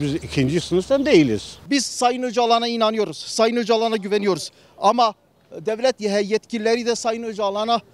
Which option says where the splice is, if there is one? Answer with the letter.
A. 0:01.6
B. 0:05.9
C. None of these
A